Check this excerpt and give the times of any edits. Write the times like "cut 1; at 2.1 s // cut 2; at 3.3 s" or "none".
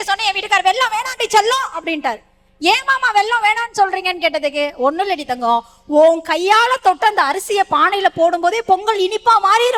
none